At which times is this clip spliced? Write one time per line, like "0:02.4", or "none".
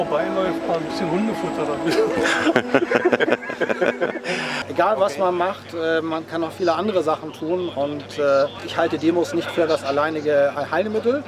0:04.6
0:08.7